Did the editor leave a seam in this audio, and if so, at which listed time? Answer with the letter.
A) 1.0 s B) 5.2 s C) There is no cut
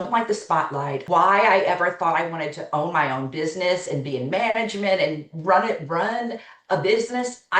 A